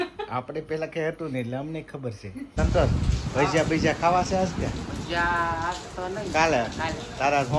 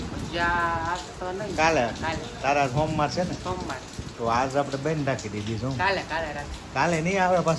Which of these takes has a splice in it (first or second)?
first